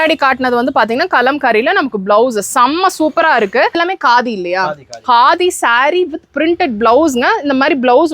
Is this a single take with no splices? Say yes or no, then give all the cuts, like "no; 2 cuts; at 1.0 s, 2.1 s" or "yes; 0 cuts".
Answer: no; 1 cut; at 3.8 s